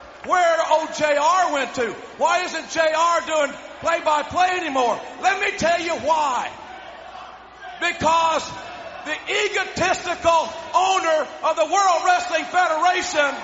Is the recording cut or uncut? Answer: uncut